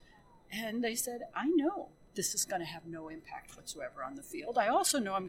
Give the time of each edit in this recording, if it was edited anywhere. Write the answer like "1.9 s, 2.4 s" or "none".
2.0 s